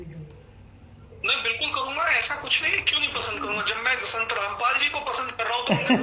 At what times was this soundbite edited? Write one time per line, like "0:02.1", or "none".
none

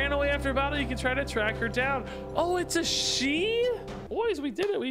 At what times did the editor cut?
0:04.0

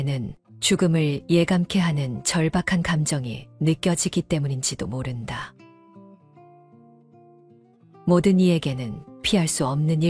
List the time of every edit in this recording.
0:05.5
0:08.1

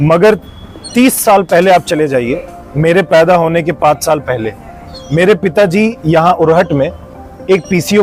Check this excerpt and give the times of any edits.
none

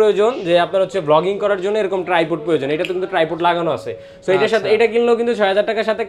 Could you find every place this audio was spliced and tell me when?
none

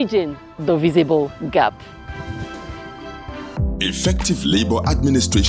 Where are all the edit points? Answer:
0:03.5

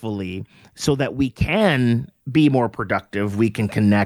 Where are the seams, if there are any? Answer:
0:02.1

